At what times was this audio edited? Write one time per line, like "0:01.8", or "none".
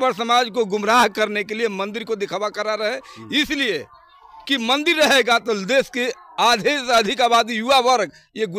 none

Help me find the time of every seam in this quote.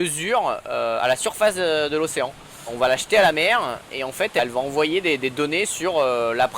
0:02.7
0:04.4

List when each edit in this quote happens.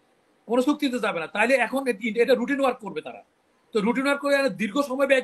none

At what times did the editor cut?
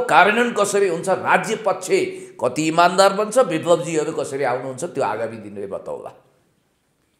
none

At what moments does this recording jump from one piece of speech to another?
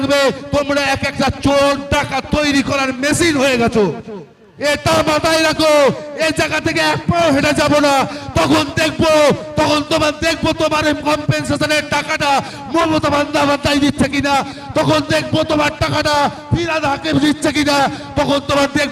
0:04.4

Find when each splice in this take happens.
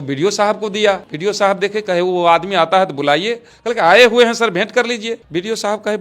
0:01.1
0:05.2

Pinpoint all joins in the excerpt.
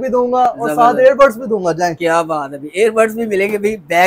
none

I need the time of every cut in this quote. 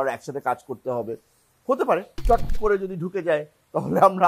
0:02.1

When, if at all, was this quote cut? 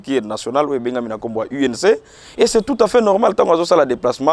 none

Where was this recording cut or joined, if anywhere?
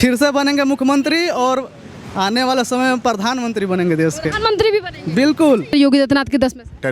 0:05.7

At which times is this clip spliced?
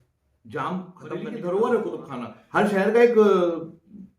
0:01.2

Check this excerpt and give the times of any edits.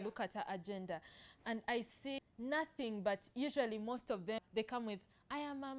0:02.2
0:04.4

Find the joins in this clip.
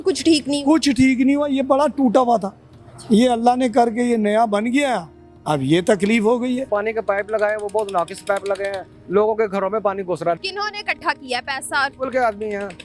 0:06.7
0:10.4

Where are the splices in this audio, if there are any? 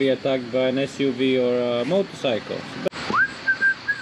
0:02.9

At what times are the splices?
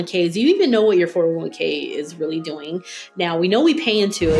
none

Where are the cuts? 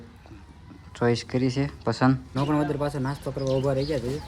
0:02.3

